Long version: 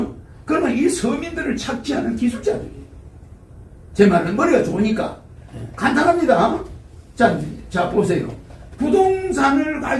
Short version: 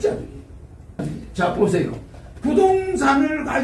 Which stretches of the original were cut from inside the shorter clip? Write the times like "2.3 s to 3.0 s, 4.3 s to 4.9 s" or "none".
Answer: 3.5 s to 7.4 s